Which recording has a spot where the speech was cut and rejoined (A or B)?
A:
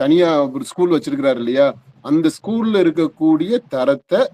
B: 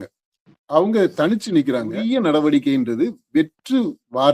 B